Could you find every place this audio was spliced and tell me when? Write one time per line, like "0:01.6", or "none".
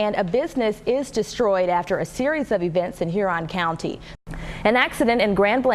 0:04.1